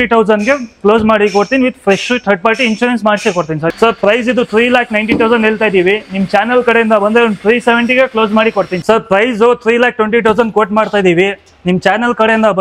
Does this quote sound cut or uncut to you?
cut